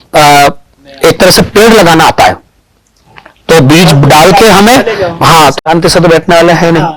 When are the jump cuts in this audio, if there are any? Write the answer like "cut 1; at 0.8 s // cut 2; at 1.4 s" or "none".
cut 1; at 5.5 s